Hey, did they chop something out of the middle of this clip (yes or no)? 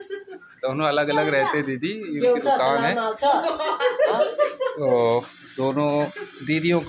no